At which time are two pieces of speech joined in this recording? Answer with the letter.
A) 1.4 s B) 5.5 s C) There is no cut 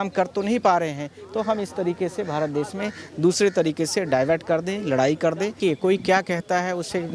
B